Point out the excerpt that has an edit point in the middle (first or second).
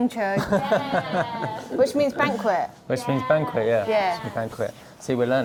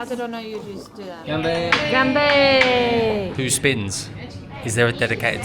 second